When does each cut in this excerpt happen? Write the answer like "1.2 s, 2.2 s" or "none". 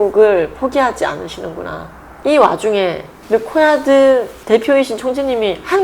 2.1 s